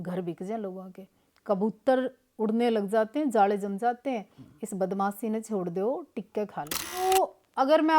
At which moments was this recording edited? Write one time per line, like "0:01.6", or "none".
0:07.0